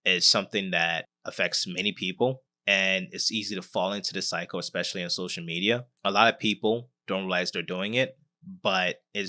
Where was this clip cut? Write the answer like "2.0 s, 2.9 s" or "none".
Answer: 1.2 s, 2.5 s, 5.9 s